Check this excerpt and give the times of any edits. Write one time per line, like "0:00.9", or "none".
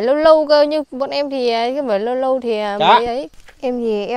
0:03.3